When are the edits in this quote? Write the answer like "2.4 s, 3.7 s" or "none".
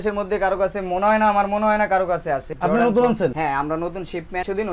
none